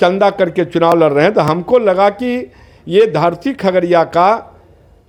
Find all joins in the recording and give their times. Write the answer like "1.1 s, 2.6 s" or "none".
none